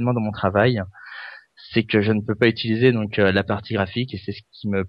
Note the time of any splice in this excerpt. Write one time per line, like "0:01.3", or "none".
none